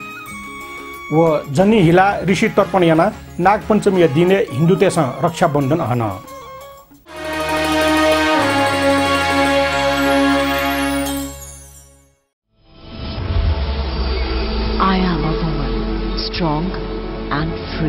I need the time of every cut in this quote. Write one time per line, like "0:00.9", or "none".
0:07.0